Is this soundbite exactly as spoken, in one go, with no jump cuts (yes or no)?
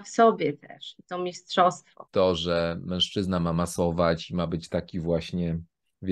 no